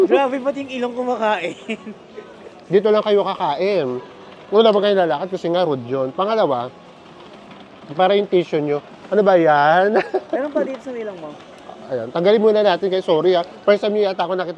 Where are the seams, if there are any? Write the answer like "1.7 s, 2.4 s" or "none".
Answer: none